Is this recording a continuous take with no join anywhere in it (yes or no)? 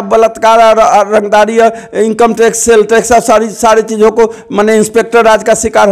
yes